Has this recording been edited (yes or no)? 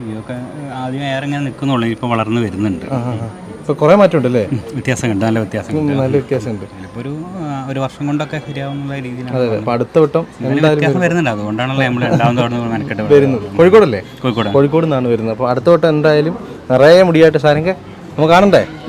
no